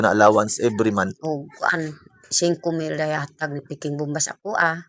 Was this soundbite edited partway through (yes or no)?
no